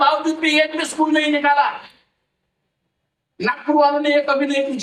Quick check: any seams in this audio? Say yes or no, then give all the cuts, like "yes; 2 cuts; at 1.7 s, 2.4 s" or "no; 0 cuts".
no; 0 cuts